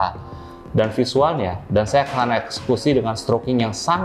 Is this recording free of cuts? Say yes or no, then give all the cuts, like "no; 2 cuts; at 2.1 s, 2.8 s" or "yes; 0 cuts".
yes; 0 cuts